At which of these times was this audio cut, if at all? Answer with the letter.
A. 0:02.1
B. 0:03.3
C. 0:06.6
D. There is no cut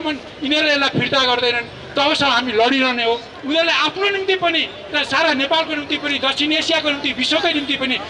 B